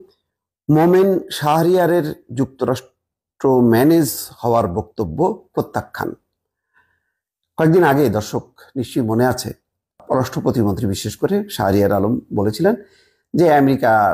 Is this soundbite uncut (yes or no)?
yes